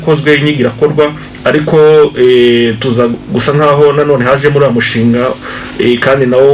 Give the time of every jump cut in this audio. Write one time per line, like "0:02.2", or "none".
none